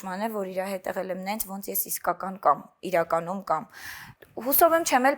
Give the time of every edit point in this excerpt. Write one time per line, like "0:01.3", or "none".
none